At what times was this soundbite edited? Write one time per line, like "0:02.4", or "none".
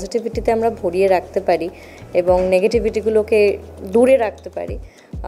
none